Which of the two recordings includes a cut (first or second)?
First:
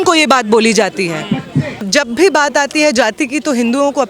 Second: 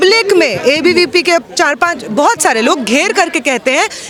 first